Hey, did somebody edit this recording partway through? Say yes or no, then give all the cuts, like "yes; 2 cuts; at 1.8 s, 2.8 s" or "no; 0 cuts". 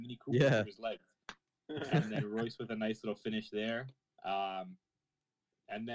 no; 0 cuts